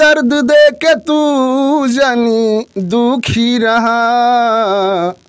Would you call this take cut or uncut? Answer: uncut